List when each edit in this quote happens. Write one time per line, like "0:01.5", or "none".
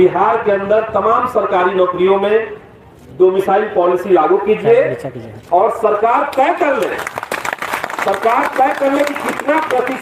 none